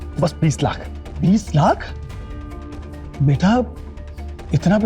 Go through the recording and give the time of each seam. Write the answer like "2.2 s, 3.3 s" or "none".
1.2 s